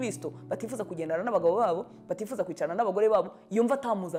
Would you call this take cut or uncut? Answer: uncut